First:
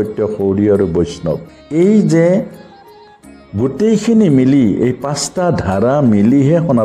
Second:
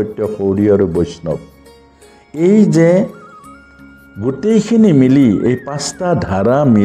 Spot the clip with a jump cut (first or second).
first